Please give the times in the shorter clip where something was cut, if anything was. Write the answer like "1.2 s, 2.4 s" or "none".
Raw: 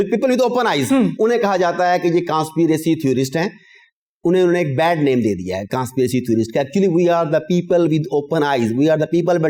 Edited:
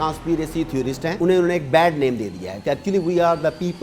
1.1 s, 2.6 s